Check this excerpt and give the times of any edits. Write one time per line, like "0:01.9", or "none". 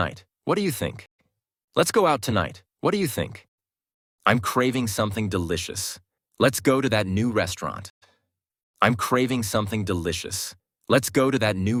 none